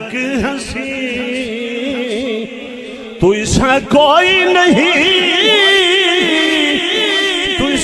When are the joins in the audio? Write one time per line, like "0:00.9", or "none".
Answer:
none